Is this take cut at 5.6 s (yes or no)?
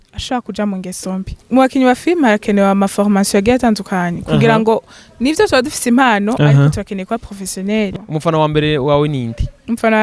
no